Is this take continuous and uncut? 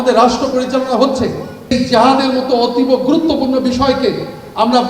no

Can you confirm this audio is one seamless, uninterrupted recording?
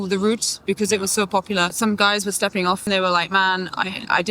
no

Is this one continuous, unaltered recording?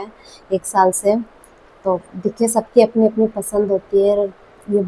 yes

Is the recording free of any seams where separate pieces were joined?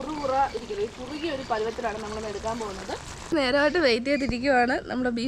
no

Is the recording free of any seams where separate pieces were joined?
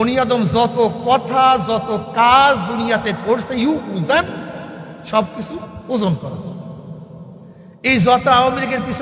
yes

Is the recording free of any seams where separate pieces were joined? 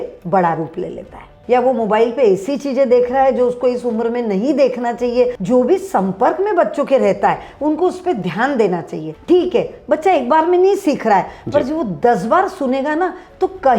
no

